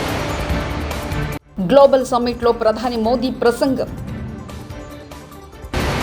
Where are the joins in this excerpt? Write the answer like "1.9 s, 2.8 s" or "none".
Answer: 1.3 s